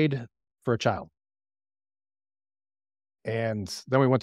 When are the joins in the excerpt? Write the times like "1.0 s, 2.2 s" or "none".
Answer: none